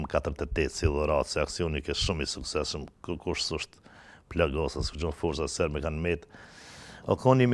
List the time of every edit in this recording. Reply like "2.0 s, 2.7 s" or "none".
none